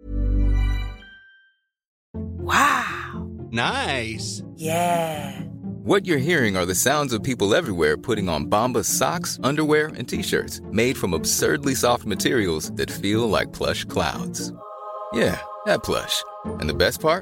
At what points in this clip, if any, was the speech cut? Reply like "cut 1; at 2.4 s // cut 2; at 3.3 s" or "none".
cut 1; at 2.0 s